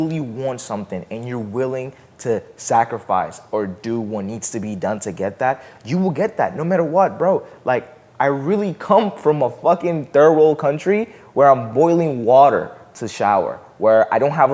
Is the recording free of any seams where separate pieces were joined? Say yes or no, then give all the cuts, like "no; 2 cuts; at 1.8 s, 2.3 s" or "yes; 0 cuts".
yes; 0 cuts